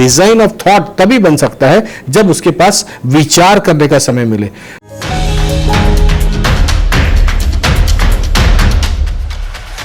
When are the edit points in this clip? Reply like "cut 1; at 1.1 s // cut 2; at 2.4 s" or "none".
cut 1; at 4.7 s